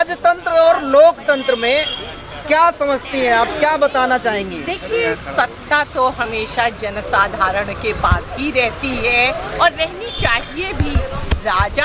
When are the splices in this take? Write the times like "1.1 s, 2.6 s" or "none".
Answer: none

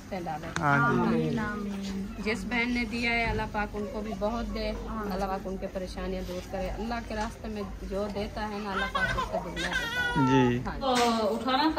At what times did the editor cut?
5.3 s, 10.7 s

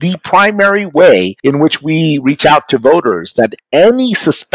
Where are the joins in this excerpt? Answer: 1.3 s, 3.6 s

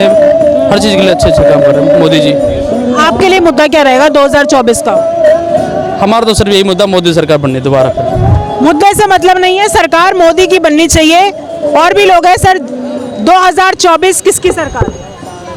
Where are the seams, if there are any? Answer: none

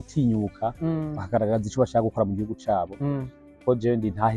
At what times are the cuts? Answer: none

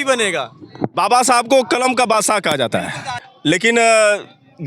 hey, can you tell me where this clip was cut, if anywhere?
2.7 s

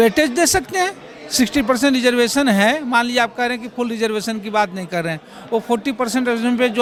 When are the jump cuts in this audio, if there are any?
none

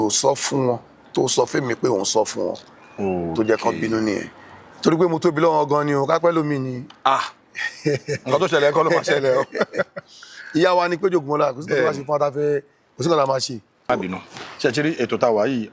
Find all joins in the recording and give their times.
13.9 s

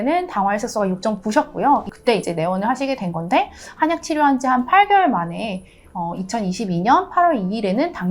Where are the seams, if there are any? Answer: 1.9 s

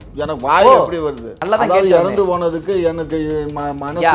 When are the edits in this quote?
1.3 s

